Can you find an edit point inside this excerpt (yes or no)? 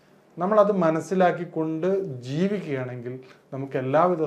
no